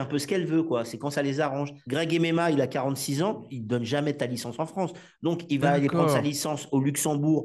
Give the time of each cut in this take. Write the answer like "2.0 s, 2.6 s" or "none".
1.8 s, 3.5 s